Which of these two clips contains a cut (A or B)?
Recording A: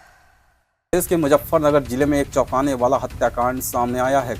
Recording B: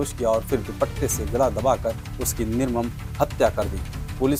A